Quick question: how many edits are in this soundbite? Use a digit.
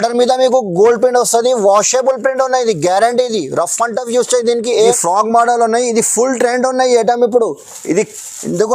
1